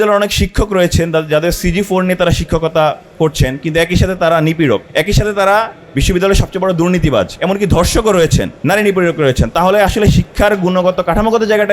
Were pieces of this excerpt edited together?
yes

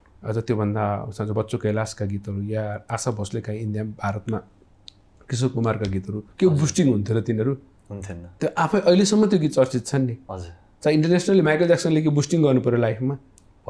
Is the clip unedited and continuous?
yes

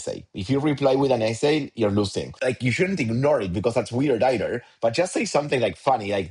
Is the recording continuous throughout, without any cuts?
no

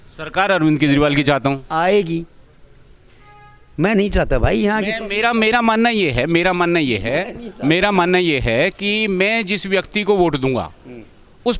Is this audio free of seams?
yes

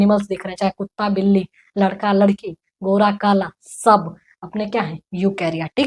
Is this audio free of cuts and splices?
yes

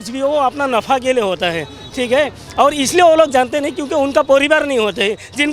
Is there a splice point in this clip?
no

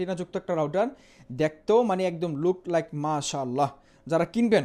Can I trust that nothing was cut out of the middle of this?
yes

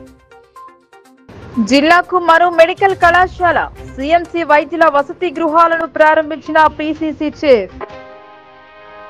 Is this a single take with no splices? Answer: yes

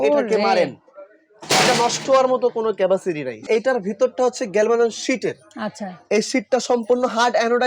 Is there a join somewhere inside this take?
yes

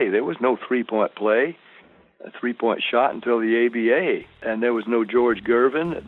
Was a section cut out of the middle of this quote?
yes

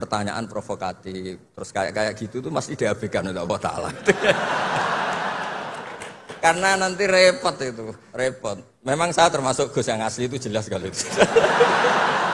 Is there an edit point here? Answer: yes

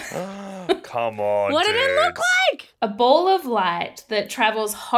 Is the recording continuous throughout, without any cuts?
no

